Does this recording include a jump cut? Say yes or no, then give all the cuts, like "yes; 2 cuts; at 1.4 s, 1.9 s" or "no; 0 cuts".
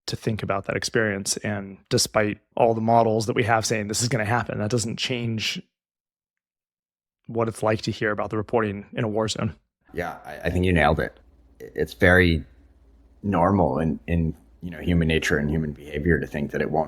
yes; 1 cut; at 2.4 s